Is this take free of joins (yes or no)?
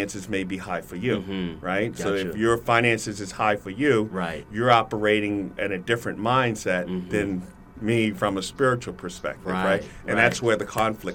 yes